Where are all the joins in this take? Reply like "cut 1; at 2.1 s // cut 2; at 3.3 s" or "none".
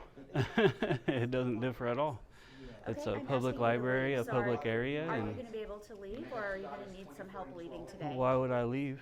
none